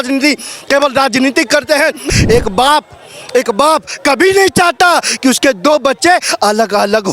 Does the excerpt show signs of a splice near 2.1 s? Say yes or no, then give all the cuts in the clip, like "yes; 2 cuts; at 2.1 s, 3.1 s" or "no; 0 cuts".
yes; 1 cut; at 2.1 s